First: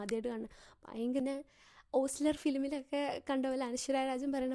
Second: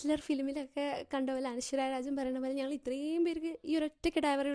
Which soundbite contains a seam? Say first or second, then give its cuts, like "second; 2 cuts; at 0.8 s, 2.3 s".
first; 1 cut; at 1.2 s